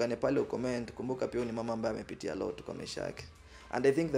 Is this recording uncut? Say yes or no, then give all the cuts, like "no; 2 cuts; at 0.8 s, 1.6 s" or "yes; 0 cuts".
yes; 0 cuts